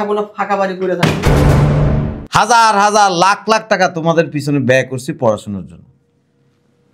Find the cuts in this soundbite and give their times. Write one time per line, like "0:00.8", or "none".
0:02.2